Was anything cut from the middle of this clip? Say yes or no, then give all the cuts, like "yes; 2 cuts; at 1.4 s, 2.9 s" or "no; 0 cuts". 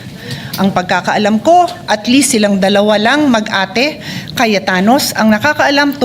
no; 0 cuts